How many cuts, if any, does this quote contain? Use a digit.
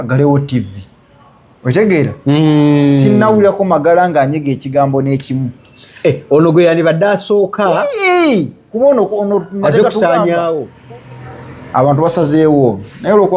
1